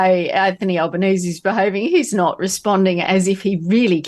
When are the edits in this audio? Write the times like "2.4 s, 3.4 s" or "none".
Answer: none